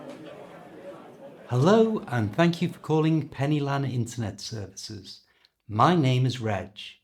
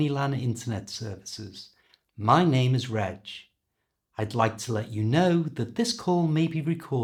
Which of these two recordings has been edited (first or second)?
first